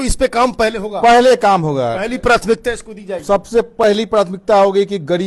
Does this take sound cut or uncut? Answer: uncut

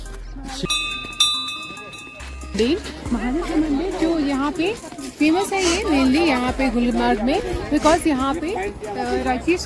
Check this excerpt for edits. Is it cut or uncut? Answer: cut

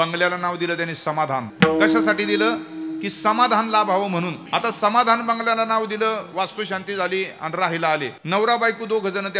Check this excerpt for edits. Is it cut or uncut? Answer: cut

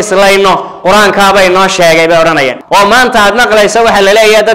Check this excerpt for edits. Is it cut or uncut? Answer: cut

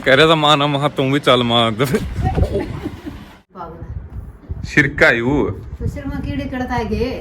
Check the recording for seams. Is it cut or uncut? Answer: cut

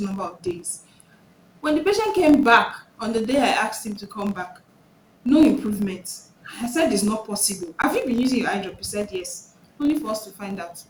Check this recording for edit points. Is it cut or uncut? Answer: uncut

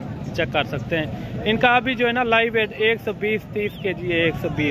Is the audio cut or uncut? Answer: uncut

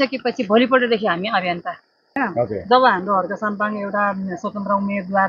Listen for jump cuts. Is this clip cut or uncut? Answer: cut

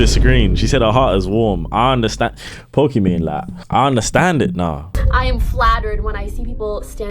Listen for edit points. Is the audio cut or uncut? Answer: cut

